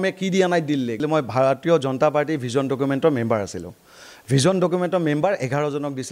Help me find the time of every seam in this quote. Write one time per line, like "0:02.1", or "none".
0:01.0